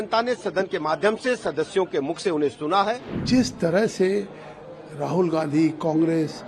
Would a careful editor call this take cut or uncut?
cut